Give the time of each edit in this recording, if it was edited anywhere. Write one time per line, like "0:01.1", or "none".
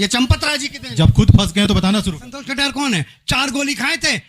0:02.3

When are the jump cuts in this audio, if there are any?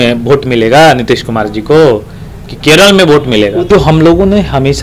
0:03.6

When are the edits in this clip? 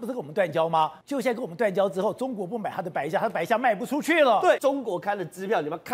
0:01.0
0:04.6

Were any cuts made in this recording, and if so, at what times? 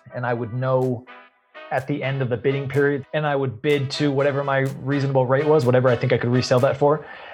0:03.0

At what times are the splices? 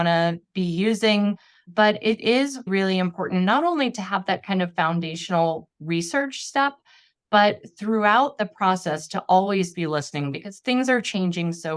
0:01.6
0:02.7

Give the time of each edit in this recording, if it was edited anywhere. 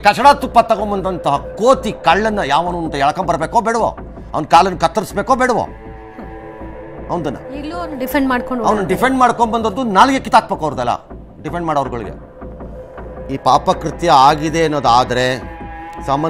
none

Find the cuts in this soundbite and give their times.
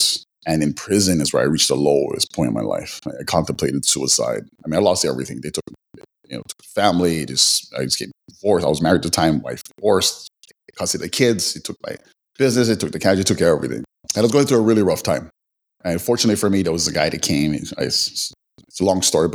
none

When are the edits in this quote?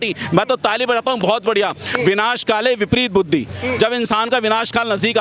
none

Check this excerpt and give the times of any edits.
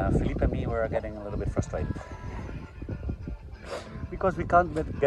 none

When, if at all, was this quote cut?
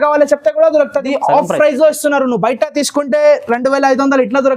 0:01.1

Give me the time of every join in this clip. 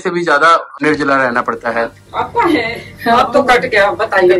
0:02.0

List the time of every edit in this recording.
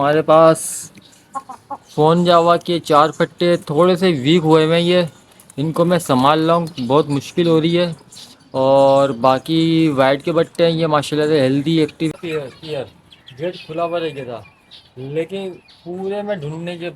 0:12.1

